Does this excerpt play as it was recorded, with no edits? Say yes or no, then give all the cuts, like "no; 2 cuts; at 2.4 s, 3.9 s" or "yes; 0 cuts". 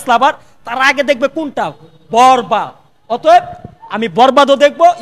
yes; 0 cuts